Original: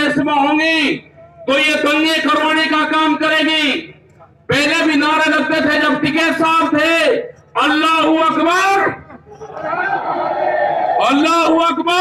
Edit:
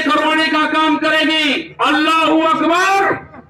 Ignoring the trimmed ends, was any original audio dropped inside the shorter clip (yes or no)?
yes